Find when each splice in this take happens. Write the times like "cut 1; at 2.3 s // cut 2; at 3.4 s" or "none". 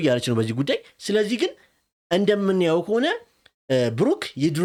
none